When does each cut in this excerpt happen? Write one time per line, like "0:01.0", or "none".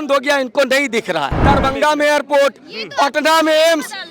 0:01.3